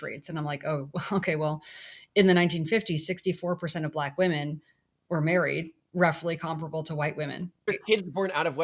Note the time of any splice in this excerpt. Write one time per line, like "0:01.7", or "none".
0:07.7